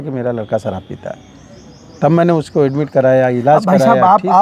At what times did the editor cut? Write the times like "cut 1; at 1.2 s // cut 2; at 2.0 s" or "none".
none